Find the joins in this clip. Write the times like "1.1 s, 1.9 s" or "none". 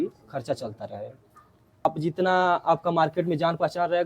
1.8 s